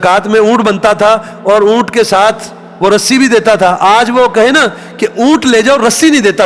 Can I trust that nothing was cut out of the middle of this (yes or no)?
yes